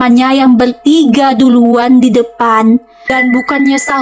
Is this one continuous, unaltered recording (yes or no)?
no